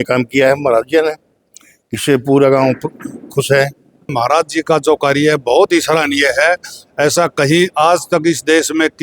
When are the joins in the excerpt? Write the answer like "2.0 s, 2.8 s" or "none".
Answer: 4.1 s